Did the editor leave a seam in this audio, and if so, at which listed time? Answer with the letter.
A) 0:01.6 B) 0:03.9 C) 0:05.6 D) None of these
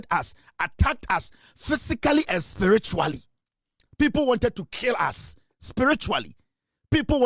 D